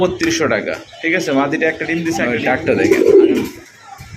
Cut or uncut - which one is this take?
cut